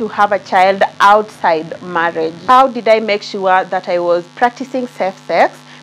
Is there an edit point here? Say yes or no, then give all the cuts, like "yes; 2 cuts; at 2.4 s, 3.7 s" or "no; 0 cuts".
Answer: yes; 1 cut; at 2.4 s